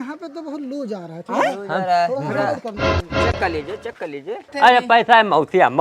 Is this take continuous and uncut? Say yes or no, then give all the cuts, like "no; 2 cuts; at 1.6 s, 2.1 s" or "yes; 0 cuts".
no; 1 cut; at 4.5 s